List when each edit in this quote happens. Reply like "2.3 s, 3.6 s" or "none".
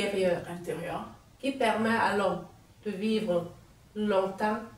none